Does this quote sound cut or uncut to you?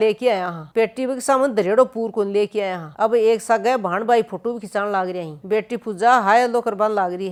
uncut